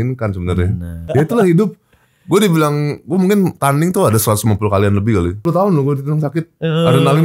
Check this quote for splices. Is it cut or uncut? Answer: cut